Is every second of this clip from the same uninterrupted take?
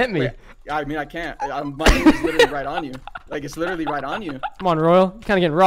no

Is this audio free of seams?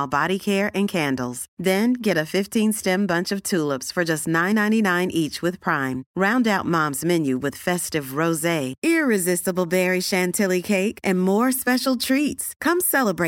yes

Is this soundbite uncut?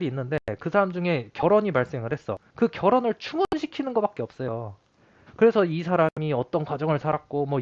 yes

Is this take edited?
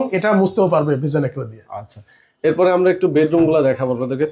no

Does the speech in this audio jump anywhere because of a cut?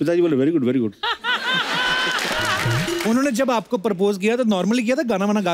yes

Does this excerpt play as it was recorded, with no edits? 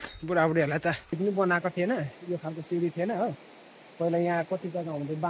no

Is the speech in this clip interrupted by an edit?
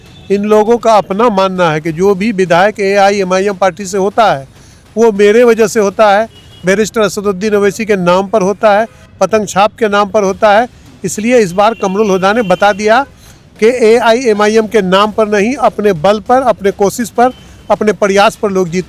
no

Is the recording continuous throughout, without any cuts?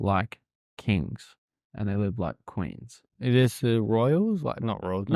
yes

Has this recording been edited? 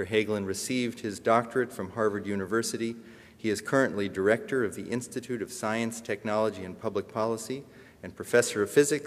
yes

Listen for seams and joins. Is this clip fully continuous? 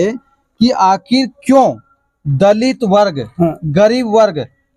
yes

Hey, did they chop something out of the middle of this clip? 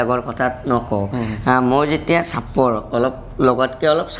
no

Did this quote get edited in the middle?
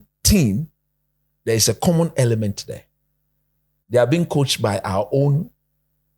no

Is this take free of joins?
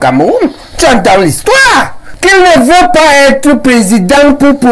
no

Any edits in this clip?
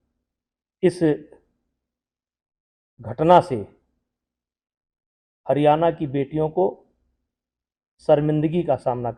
no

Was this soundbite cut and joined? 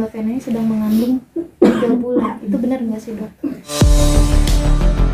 yes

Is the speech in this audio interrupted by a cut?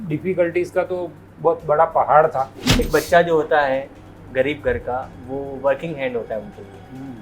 yes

